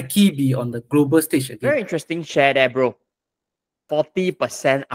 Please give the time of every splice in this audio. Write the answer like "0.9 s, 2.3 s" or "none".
1.5 s